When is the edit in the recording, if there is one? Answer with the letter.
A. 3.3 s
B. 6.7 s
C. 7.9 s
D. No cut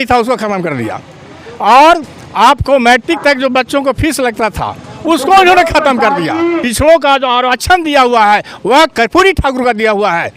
B